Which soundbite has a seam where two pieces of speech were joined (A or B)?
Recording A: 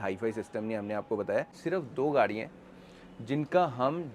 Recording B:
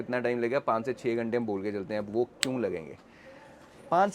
A